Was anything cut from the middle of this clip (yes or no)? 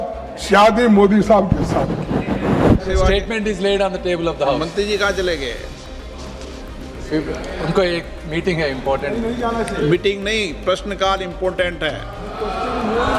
yes